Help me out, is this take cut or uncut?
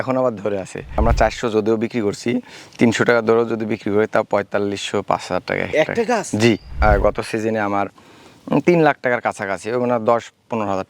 cut